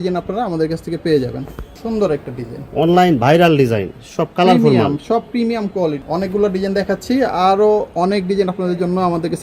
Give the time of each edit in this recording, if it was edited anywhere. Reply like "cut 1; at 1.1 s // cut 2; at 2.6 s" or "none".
cut 1; at 6.0 s